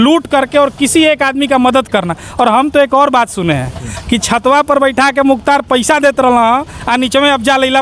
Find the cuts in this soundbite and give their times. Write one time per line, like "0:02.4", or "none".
none